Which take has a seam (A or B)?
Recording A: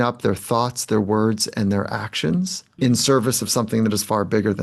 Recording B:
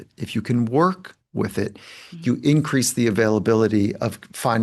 A